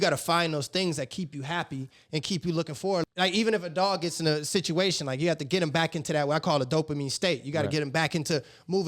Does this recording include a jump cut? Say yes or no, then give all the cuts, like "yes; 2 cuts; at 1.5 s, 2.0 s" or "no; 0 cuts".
yes; 1 cut; at 3.0 s